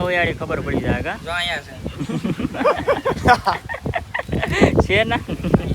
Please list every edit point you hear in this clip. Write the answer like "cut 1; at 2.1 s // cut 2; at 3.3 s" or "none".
cut 1; at 3.2 s